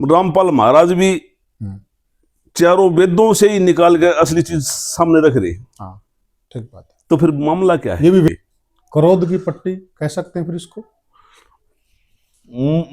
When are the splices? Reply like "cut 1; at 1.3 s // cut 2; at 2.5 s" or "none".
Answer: cut 1; at 8.3 s